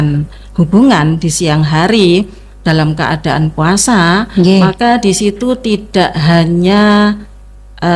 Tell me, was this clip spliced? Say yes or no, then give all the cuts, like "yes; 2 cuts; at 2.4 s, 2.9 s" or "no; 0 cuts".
no; 0 cuts